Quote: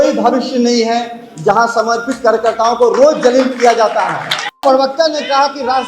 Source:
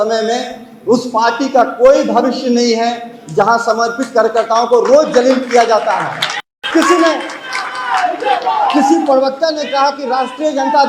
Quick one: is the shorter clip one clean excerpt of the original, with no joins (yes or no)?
no